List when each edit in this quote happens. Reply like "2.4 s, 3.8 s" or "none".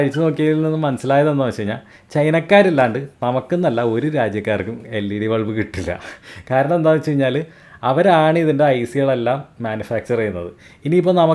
none